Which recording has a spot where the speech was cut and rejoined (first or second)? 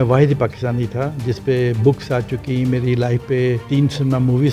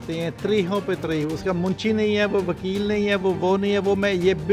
first